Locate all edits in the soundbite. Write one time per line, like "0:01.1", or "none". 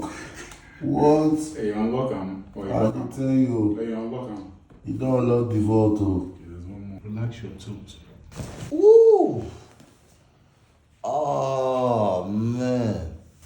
0:07.0